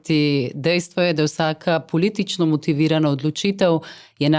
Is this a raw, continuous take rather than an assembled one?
yes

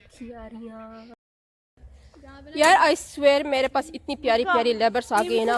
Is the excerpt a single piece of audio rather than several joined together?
no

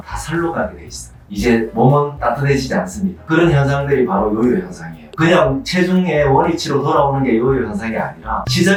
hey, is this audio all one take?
yes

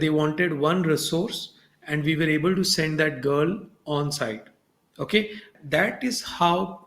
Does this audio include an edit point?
yes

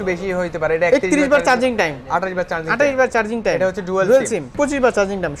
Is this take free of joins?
no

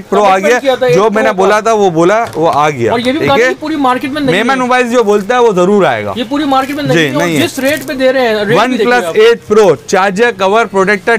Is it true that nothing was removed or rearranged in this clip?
yes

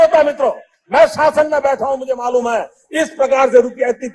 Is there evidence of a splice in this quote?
no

